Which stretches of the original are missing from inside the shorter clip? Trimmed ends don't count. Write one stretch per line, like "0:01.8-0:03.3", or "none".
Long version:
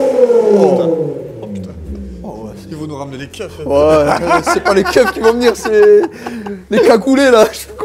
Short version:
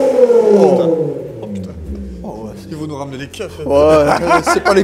none